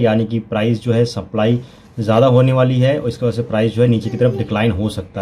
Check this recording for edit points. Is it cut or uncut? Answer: uncut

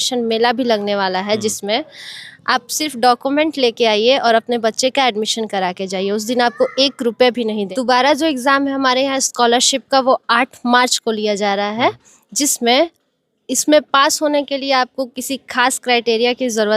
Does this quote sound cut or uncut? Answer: cut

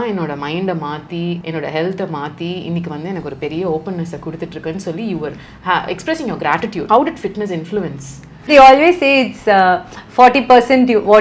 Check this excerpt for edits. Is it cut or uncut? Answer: cut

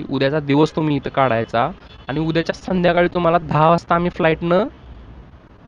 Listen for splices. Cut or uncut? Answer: uncut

